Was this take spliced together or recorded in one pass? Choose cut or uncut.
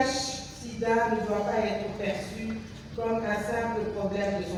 uncut